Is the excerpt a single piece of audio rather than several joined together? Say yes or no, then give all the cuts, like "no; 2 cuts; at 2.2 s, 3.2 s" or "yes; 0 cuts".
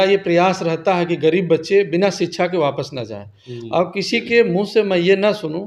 yes; 0 cuts